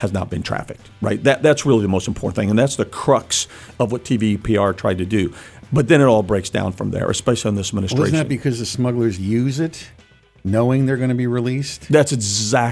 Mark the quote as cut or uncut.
uncut